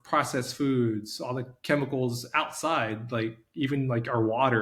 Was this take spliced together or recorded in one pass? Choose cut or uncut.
uncut